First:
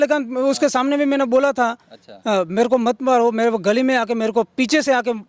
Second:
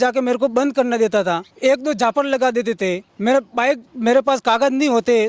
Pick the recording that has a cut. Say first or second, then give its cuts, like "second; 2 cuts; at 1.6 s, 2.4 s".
second; 3 cuts; at 1.5 s, 3.1 s, 3.9 s